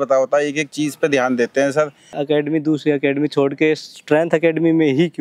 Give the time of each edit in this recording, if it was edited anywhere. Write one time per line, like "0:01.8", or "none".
0:02.2